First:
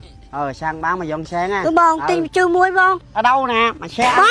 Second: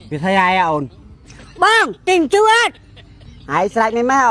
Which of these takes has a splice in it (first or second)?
first